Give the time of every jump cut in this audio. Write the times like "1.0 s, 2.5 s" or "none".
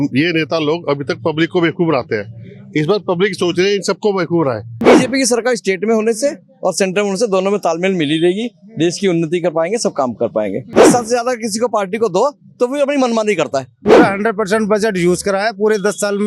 4.8 s, 10.7 s, 13.7 s